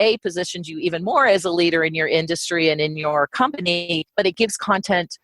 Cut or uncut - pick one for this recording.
uncut